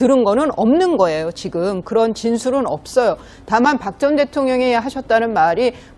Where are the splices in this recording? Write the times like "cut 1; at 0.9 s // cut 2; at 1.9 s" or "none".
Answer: cut 1; at 4.2 s